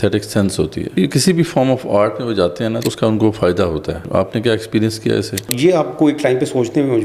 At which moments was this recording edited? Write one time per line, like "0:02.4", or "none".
0:00.9
0:02.8
0:04.0
0:05.5